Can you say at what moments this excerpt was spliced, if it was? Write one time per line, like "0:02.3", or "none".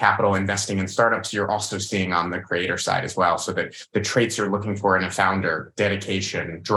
none